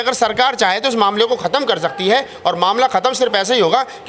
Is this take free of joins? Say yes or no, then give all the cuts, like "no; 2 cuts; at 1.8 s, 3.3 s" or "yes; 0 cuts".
yes; 0 cuts